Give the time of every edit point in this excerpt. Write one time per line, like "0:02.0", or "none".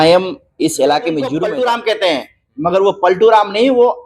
0:01.3